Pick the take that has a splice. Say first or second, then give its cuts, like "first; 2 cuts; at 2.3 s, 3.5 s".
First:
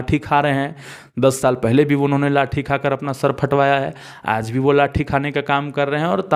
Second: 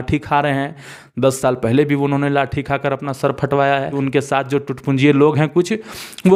second; 1 cut; at 3.9 s